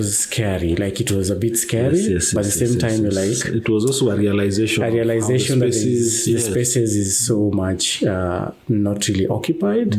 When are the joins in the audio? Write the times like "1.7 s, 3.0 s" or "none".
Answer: none